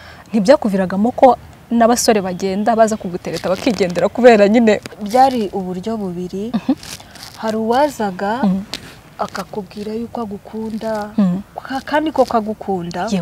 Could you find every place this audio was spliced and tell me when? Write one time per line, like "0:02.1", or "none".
0:04.9